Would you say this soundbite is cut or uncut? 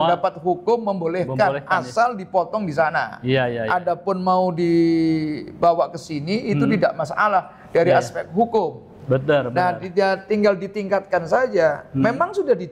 uncut